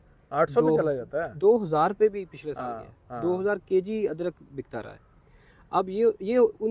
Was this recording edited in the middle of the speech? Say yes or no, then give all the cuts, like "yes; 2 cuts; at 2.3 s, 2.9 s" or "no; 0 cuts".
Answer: no; 0 cuts